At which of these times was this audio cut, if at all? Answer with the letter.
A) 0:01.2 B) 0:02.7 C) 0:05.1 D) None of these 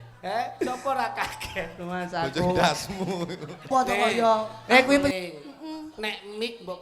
C